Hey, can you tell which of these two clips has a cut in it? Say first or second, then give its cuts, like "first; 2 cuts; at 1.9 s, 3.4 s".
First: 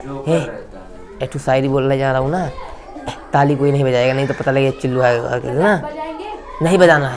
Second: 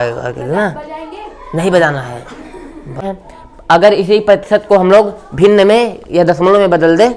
second; 1 cut; at 3.1 s